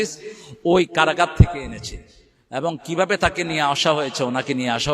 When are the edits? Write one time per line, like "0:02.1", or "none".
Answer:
none